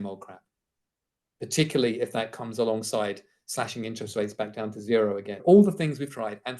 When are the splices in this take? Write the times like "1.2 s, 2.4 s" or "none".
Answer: 5.4 s